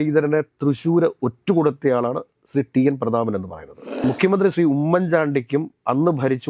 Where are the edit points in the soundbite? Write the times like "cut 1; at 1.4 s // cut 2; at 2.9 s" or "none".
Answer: cut 1; at 4.0 s